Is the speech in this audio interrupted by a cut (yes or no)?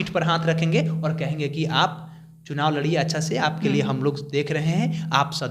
no